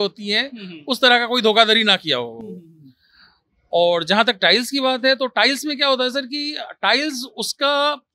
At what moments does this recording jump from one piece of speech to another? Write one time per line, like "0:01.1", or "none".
none